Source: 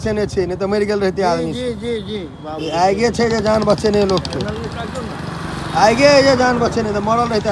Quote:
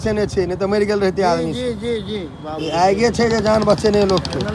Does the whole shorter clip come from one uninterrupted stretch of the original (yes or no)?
yes